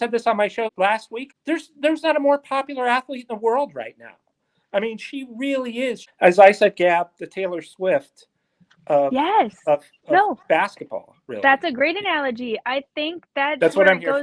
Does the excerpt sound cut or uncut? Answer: cut